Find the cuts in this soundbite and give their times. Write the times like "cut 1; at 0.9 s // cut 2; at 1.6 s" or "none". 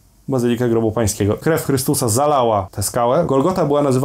cut 1; at 1.4 s // cut 2; at 3.1 s